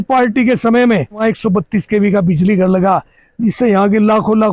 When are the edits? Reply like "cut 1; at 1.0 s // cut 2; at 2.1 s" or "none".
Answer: cut 1; at 1.2 s